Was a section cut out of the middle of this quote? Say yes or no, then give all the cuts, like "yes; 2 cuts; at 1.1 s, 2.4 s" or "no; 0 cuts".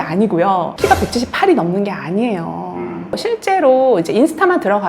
yes; 1 cut; at 3.1 s